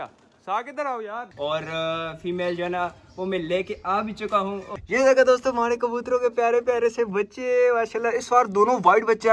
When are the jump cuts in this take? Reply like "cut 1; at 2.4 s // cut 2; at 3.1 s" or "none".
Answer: cut 1; at 1.3 s // cut 2; at 4.7 s